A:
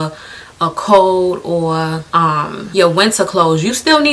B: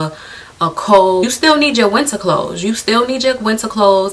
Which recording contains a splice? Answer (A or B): B